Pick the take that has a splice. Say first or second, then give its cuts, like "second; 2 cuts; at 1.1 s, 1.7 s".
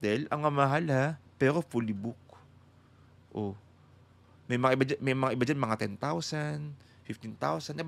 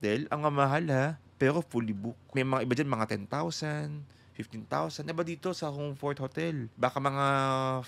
second; 2 cuts; at 2.3 s, 6.7 s